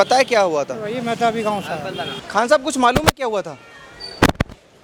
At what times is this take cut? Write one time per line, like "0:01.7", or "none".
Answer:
none